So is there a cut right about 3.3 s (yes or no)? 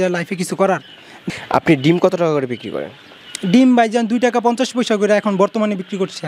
no